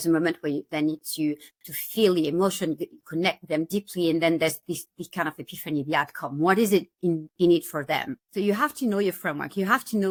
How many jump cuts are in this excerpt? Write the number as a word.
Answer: zero